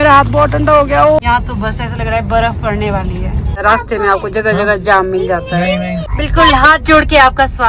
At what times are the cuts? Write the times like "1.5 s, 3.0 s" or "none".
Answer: 1.2 s, 3.6 s, 6.1 s